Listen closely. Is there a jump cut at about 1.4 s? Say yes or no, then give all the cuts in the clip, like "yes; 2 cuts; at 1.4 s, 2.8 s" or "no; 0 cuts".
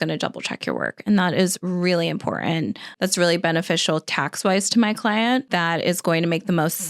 no; 2 cuts; at 2.8 s, 5.5 s